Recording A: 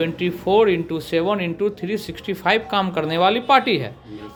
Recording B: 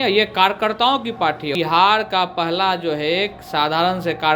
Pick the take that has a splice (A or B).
B